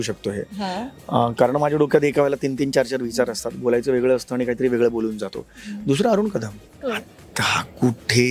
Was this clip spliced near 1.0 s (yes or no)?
no